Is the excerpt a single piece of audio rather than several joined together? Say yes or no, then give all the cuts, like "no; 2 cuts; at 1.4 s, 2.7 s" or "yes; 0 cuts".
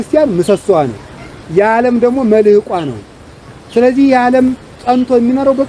yes; 0 cuts